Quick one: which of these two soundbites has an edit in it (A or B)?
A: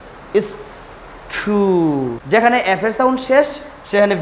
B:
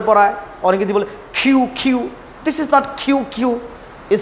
A